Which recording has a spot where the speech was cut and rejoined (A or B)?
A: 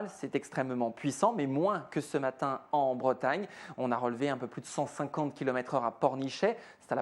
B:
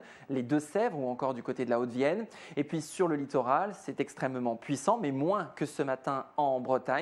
A